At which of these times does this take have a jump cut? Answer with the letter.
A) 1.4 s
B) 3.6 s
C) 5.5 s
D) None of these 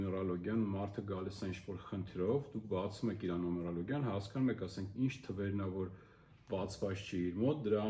D